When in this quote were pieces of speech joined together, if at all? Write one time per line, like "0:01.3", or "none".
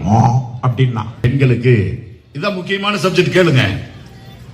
0:01.3